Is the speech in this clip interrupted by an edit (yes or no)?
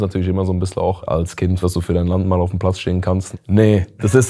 yes